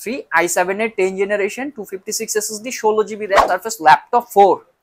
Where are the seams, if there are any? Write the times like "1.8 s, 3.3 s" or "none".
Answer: 3.4 s